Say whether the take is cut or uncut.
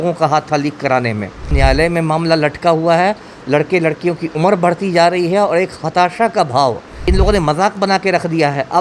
cut